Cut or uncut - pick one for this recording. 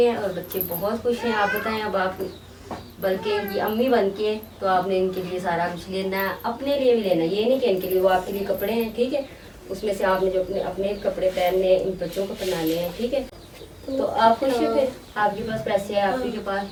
uncut